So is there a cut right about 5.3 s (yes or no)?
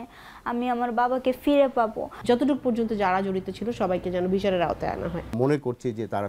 yes